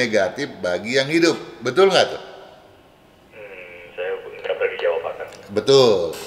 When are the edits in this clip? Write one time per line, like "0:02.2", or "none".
none